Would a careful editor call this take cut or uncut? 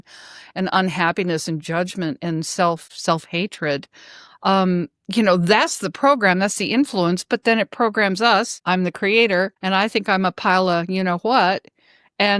cut